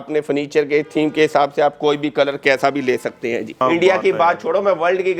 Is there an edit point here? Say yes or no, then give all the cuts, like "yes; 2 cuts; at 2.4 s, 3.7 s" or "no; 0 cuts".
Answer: yes; 1 cut; at 3.6 s